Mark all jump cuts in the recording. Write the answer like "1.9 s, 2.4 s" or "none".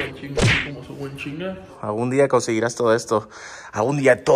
1.7 s